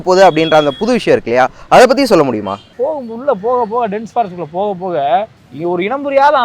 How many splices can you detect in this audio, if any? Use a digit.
2